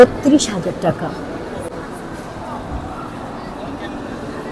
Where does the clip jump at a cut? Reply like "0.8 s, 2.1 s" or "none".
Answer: none